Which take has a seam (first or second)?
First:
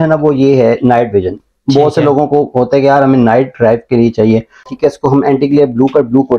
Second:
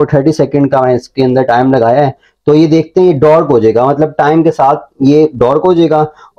first